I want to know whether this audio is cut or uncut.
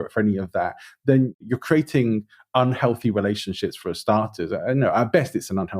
cut